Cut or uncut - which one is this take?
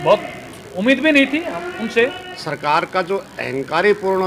cut